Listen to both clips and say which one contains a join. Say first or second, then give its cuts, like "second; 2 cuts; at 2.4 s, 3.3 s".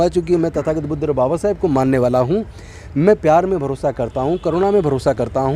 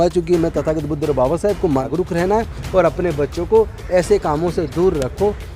second; 1 cut; at 1.8 s